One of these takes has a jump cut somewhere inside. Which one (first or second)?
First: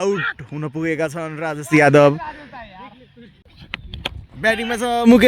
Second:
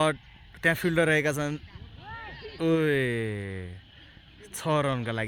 first